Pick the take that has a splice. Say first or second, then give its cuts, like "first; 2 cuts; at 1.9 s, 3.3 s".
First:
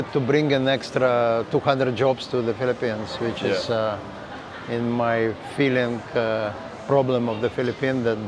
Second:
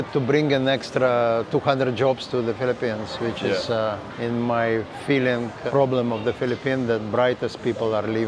second; 2 cuts; at 4.1 s, 5.6 s